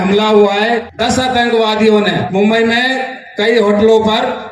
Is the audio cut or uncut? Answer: cut